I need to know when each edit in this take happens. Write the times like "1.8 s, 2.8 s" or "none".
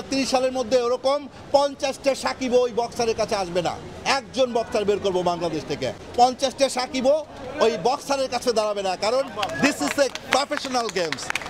none